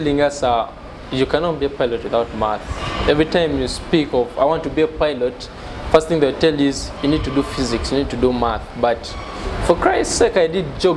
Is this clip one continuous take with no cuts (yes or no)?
yes